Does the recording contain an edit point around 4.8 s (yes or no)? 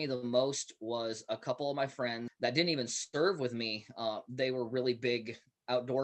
no